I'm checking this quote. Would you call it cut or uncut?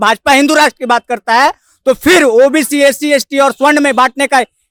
uncut